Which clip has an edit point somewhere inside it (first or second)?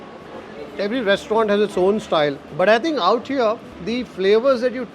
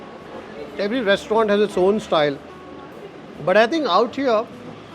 first